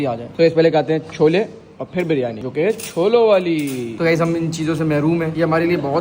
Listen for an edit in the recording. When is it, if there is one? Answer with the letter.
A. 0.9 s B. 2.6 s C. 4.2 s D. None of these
D